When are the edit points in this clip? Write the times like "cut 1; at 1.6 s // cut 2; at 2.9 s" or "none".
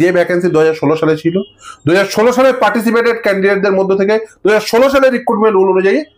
none